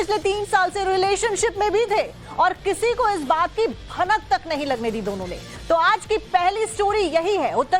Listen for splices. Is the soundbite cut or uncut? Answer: cut